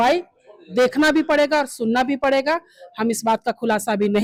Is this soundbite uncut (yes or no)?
yes